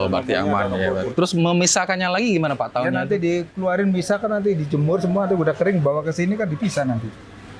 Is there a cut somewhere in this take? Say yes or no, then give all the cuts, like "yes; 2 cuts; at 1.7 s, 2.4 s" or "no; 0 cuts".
yes; 1 cut; at 1.1 s